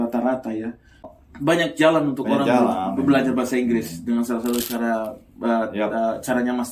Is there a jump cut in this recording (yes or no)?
yes